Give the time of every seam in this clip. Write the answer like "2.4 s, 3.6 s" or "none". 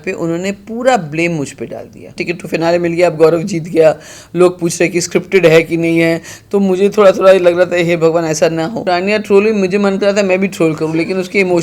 2.2 s, 8.8 s